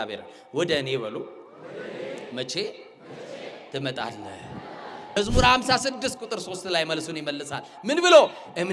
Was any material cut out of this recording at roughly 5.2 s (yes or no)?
yes